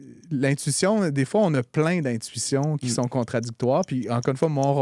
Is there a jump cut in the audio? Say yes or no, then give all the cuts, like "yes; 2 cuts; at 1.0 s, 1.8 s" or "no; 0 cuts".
no; 0 cuts